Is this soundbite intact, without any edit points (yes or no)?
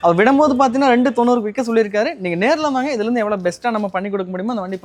yes